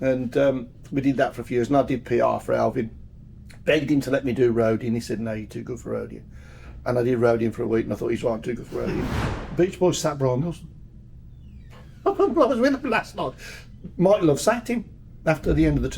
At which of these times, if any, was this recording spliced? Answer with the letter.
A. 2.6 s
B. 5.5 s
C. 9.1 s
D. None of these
C